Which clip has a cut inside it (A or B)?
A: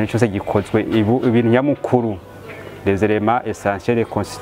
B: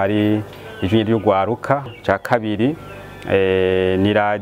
B